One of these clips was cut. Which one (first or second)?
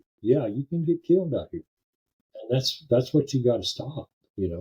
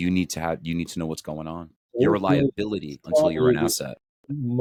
first